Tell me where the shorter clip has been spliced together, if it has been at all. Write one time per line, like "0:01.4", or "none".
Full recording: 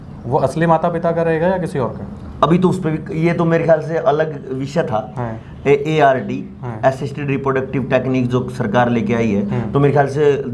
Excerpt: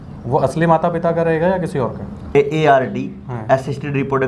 0:02.2